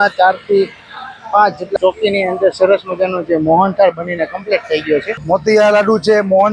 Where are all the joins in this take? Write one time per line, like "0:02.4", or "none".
0:01.7
0:05.1